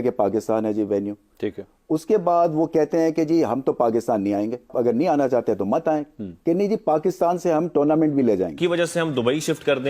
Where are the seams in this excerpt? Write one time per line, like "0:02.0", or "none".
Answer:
0:04.7
0:08.6